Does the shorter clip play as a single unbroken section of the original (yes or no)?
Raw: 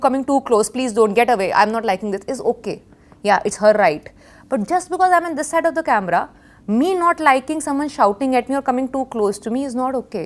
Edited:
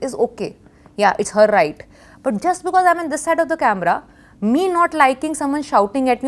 yes